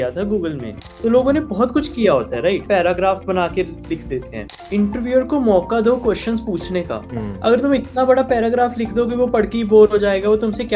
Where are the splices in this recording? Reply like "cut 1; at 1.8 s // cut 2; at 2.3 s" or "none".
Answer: cut 1; at 1.0 s // cut 2; at 2.6 s // cut 3; at 4.5 s